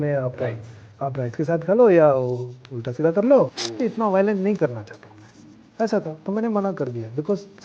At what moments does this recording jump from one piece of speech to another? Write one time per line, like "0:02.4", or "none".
0:03.6